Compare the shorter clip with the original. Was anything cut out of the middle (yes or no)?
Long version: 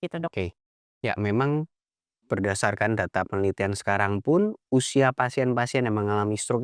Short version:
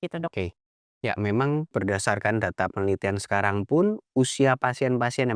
yes